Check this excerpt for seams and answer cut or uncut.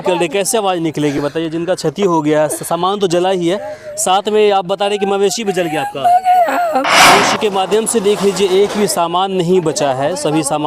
cut